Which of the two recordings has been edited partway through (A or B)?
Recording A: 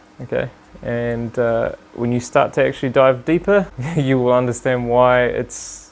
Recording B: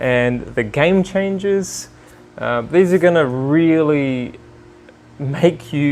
A